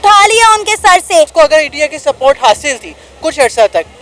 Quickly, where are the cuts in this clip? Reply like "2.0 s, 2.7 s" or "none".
1.3 s